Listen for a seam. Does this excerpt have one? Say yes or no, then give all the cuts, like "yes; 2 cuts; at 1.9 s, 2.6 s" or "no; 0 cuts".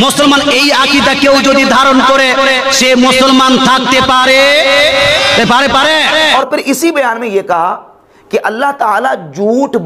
yes; 1 cut; at 6.3 s